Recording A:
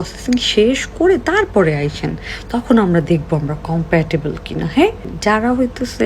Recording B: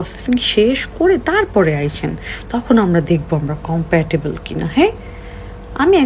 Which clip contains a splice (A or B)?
A